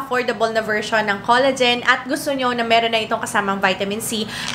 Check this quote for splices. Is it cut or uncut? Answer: uncut